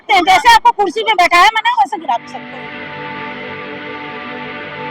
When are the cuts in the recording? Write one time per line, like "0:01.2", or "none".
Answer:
0:02.3